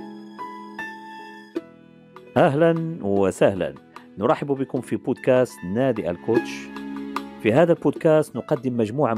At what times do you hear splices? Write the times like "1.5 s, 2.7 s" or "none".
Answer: 2.3 s